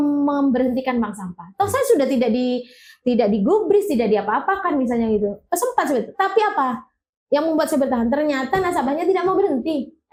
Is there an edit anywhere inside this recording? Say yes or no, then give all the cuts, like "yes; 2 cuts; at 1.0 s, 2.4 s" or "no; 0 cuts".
no; 0 cuts